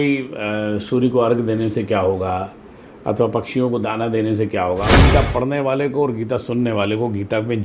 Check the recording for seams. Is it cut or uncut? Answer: cut